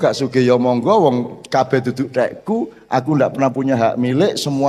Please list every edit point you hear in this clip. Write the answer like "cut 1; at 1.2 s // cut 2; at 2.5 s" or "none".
none